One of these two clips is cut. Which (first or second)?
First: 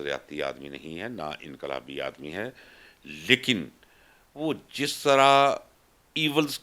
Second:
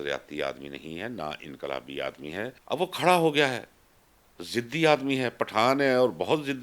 second